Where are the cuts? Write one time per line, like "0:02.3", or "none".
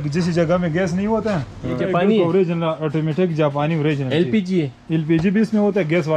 0:01.8